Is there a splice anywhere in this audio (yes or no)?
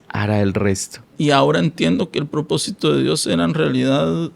yes